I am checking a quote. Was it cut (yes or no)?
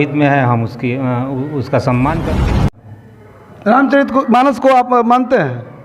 yes